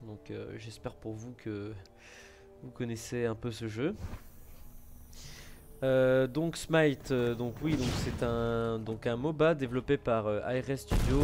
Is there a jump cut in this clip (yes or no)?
no